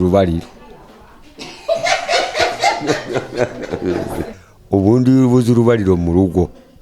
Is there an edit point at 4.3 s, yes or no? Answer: yes